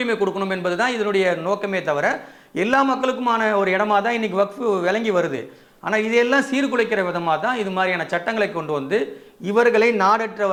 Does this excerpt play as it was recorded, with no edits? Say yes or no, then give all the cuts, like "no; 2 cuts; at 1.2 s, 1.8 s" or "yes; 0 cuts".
yes; 0 cuts